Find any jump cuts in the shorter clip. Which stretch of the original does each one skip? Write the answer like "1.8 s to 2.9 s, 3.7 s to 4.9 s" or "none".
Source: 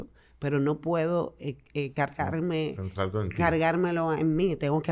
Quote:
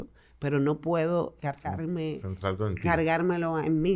1.4 s to 1.9 s